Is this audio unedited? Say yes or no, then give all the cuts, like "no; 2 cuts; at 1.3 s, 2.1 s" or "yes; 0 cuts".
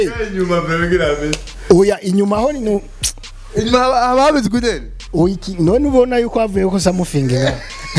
yes; 0 cuts